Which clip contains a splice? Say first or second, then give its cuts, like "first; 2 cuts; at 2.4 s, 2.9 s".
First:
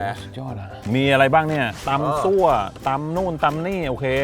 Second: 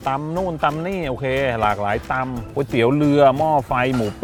first; 2 cuts; at 0.9 s, 1.8 s